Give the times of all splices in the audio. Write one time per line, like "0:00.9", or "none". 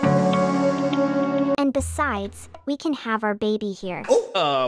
0:01.6